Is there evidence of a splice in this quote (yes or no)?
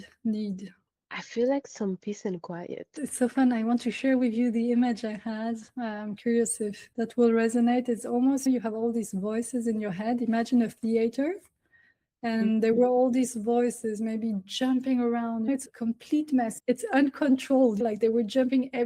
no